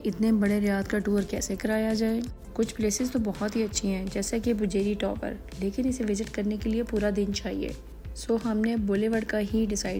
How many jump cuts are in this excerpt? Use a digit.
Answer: 0